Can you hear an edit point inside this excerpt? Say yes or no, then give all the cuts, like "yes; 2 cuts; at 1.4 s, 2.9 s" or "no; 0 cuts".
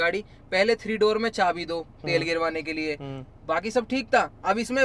no; 0 cuts